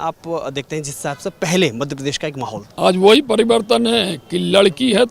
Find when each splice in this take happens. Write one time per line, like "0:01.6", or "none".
0:02.6